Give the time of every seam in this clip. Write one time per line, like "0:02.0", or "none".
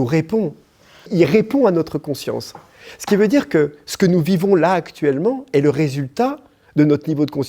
0:01.1